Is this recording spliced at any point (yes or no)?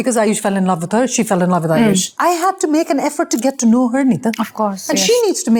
no